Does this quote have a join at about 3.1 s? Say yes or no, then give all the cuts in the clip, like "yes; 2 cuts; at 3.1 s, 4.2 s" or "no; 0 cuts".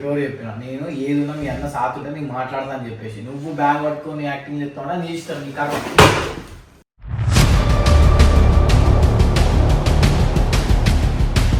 no; 0 cuts